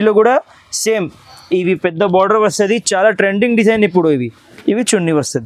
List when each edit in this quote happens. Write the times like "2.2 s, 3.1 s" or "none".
4.4 s